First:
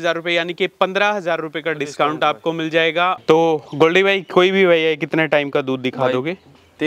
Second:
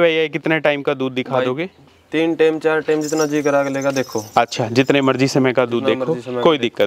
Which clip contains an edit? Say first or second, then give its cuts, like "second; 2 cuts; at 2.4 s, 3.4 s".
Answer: first; 1 cut; at 3.2 s